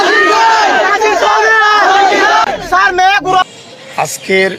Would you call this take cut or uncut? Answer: cut